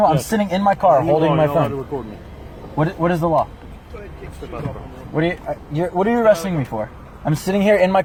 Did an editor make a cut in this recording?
no; 0 cuts

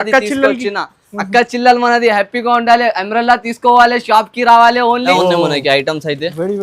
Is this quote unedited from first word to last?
no; 1 cut; at 5.1 s

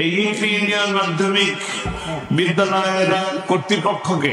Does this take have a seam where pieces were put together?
no; 0 cuts

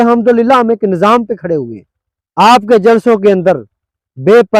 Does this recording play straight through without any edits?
yes; 0 cuts

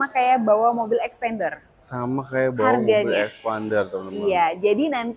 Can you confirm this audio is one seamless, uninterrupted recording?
yes; 0 cuts

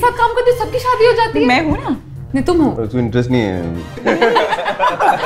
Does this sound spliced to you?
yes; 2 cuts; at 2.8 s, 4.0 s

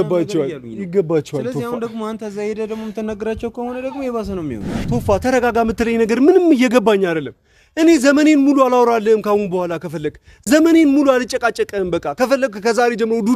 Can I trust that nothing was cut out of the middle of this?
no; 1 cut; at 4.9 s

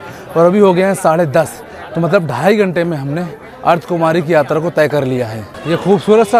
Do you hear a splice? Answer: yes; 1 cut; at 5.4 s

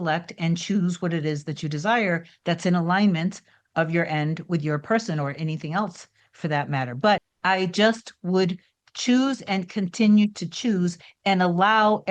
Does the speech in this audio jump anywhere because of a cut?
yes; 1 cut; at 7.3 s

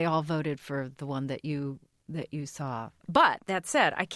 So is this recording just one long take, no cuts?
no; 1 cut; at 2.9 s

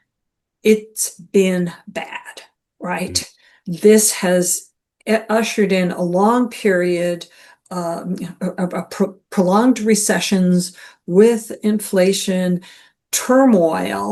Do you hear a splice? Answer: no; 0 cuts

